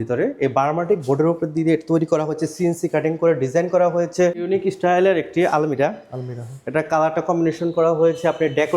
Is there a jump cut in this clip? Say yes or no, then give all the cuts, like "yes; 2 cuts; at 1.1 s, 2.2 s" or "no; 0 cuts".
yes; 1 cut; at 4.4 s